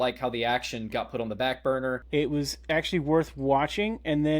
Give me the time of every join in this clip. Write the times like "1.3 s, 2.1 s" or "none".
2.0 s